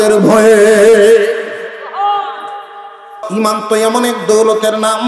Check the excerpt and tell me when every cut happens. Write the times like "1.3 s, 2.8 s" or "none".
3.1 s